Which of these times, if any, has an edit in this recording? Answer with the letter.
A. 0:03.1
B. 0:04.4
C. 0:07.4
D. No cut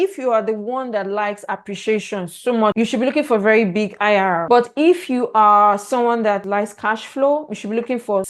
B